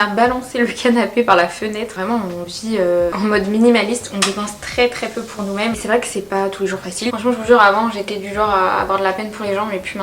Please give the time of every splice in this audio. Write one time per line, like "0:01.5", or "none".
0:01.9
0:05.8
0:07.1